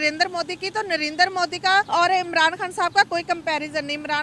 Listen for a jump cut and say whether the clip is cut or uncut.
cut